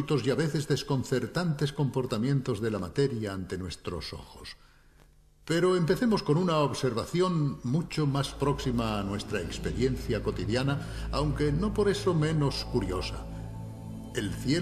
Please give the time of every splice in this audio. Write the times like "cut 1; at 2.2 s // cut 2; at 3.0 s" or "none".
cut 1; at 5.1 s